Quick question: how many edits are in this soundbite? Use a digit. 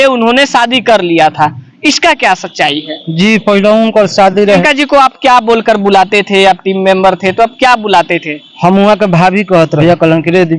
2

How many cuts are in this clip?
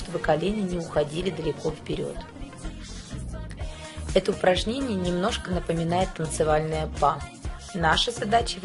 0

